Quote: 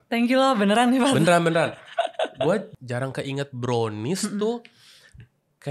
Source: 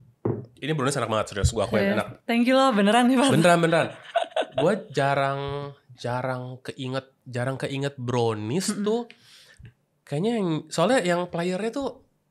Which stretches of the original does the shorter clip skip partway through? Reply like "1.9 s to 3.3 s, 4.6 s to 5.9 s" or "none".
4.9 s to 7.1 s